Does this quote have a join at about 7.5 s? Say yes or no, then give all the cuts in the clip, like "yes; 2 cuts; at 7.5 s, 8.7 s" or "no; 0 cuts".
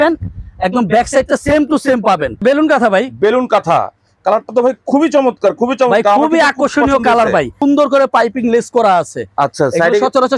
yes; 2 cuts; at 2.4 s, 7.5 s